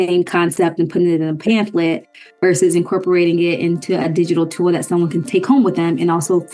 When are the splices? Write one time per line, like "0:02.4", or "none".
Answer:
0:05.3